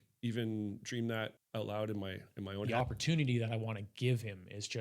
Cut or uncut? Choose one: cut